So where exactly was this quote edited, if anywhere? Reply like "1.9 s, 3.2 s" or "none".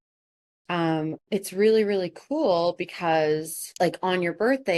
3.6 s